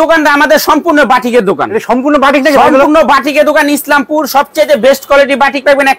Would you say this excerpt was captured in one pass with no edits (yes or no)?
yes